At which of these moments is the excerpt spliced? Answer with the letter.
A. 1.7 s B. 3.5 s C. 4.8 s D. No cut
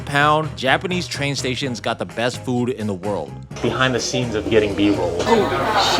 B